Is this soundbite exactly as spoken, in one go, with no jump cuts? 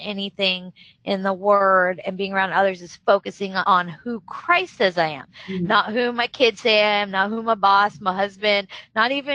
yes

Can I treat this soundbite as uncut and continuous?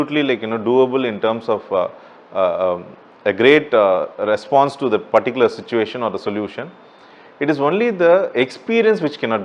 yes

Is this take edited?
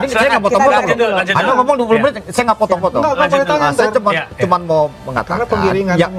no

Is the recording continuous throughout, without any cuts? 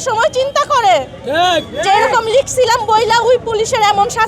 yes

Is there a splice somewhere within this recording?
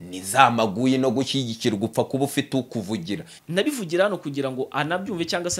yes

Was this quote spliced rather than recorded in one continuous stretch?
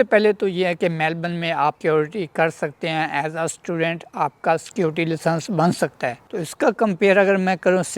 yes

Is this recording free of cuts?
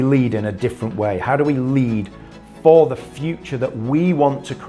yes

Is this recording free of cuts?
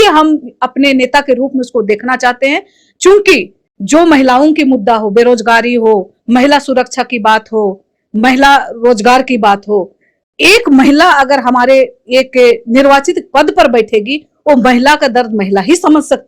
yes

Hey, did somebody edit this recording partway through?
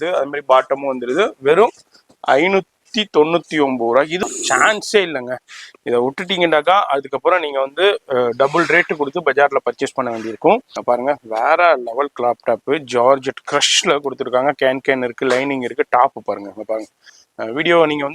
yes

